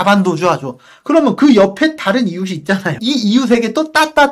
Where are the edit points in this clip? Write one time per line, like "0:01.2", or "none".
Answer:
0:03.0